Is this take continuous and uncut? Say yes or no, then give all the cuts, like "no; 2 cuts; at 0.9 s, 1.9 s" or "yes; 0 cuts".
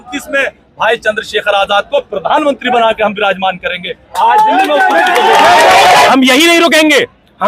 no; 1 cut; at 6.1 s